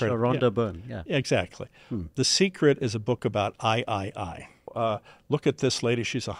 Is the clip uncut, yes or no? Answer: no